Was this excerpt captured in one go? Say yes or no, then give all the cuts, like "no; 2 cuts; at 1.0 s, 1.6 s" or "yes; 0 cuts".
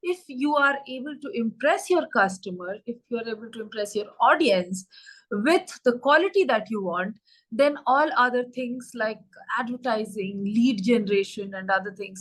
yes; 0 cuts